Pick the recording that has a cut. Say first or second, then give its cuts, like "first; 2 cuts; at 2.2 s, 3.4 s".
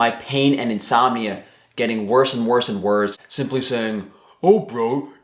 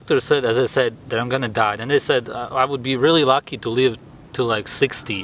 first; 1 cut; at 3.3 s